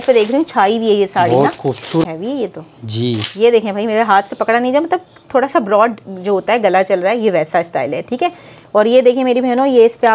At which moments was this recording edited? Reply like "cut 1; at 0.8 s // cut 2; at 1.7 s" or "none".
cut 1; at 2.0 s